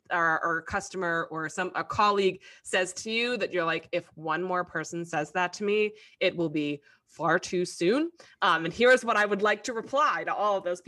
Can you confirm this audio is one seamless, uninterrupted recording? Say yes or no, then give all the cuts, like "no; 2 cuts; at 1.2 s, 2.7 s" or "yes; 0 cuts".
yes; 0 cuts